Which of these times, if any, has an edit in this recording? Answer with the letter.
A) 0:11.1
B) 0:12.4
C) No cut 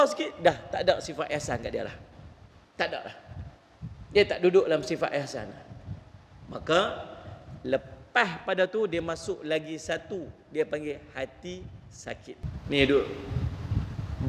B